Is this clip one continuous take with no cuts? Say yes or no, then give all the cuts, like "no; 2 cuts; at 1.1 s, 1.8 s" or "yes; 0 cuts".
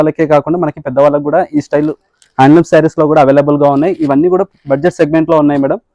yes; 0 cuts